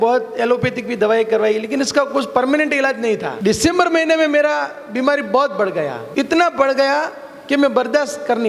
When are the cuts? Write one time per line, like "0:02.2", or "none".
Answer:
0:03.3
0:06.0